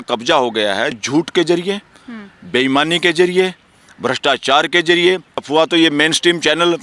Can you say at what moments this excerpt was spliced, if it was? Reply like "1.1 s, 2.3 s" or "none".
1.0 s, 5.4 s